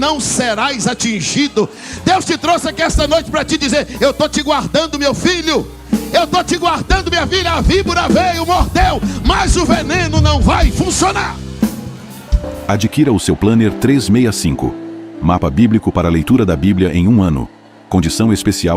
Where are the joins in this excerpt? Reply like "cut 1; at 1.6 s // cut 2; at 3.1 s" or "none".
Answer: cut 1; at 12.3 s